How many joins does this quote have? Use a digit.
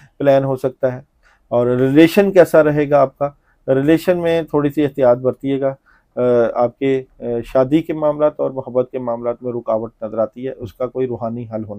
0